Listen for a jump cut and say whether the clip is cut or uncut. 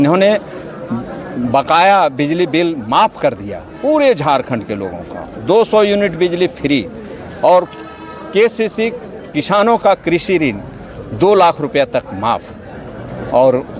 uncut